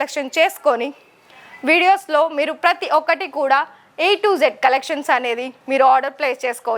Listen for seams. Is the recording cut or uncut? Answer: uncut